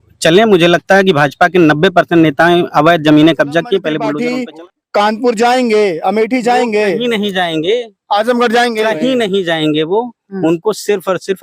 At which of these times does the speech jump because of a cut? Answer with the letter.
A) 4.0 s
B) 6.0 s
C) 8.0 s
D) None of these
A